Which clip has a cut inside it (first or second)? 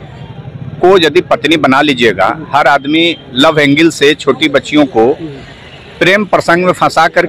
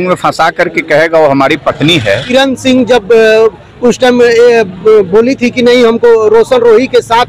second